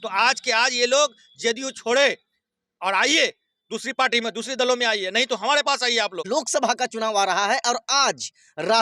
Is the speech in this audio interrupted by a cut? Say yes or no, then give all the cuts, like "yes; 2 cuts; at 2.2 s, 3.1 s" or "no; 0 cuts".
yes; 1 cut; at 6.2 s